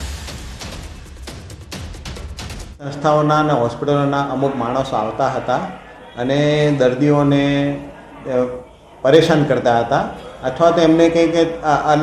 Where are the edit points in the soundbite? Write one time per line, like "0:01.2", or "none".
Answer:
none